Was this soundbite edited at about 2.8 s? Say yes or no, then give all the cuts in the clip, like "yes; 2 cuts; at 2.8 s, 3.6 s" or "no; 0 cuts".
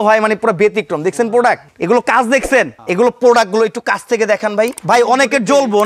yes; 3 cuts; at 1.7 s, 2.8 s, 4.8 s